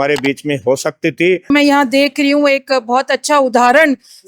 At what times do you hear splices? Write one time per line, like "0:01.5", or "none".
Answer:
0:01.5